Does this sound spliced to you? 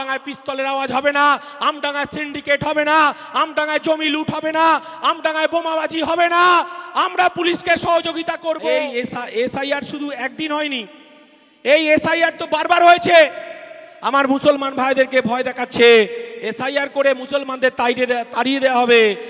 yes; 1 cut; at 8.8 s

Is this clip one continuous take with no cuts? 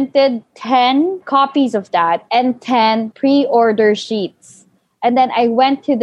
no; 3 cuts; at 1.2 s, 2.2 s, 3.1 s

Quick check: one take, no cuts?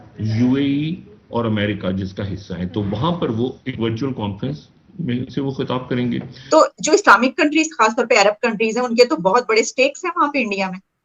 no; 1 cut; at 6.5 s

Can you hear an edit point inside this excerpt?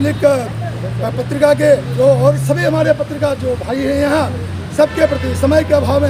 no; 0 cuts

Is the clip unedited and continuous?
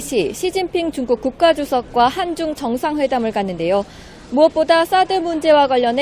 no; 1 cut; at 3.1 s

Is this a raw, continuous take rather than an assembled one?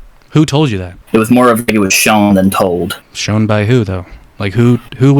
no; 2 cuts; at 0.9 s, 3.1 s

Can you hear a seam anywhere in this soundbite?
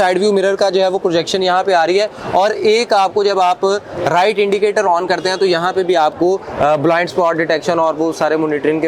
no; 0 cuts

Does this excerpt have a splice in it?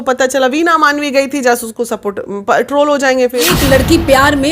yes; 1 cut; at 3.5 s

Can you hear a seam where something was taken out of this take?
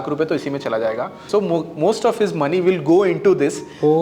yes; 1 cut; at 1.2 s

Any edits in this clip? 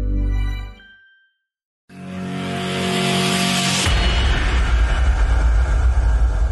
yes; 1 cut; at 1.7 s

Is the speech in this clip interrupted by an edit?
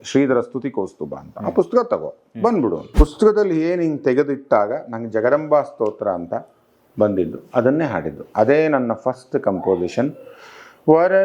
yes; 1 cut; at 2.8 s

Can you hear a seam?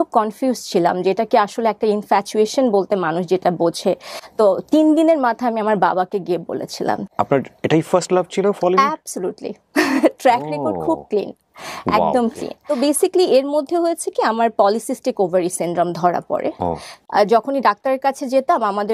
yes; 4 cuts; at 4.1 s, 7.1 s, 12.6 s, 16.9 s

